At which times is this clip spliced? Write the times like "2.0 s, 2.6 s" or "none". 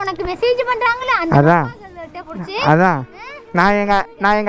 none